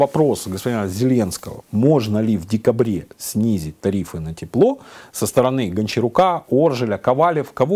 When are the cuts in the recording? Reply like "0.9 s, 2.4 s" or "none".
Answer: none

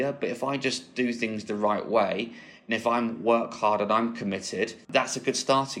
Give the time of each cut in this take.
4.9 s

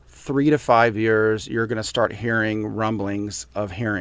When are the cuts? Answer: none

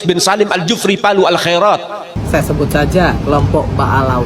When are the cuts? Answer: 2.2 s

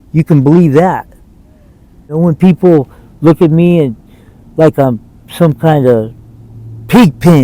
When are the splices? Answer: 2.1 s

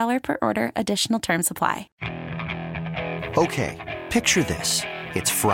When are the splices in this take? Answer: 1.9 s

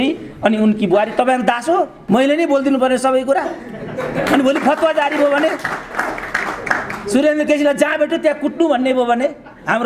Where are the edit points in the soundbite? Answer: 2.0 s

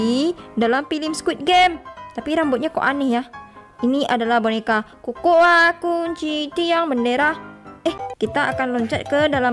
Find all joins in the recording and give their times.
8.0 s

